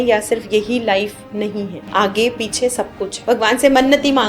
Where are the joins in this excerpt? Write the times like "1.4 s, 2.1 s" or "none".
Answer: 1.8 s, 3.1 s